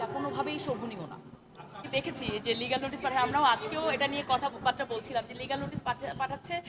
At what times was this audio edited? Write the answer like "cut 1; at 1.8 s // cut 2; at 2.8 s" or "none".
cut 1; at 1.8 s